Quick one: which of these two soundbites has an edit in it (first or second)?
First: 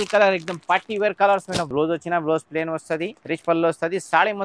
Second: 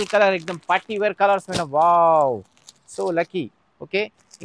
first